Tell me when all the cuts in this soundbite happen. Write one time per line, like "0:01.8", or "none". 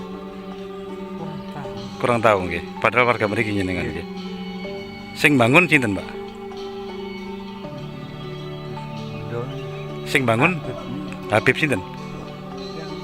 none